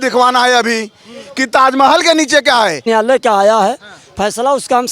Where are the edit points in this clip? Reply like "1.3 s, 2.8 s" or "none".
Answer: 2.8 s